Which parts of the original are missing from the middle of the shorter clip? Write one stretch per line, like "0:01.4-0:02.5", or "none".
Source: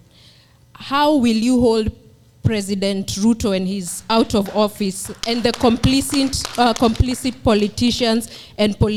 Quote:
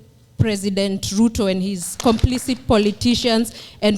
0:04.0-0:06.8